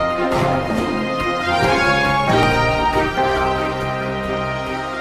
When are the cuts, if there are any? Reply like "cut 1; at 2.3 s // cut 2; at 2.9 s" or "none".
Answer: none